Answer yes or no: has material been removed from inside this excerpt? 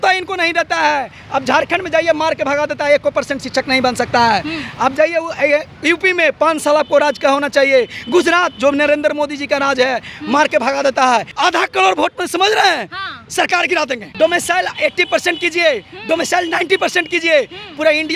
yes